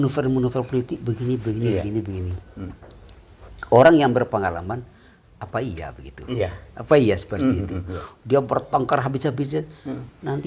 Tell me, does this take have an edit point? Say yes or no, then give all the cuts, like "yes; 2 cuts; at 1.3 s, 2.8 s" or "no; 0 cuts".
no; 0 cuts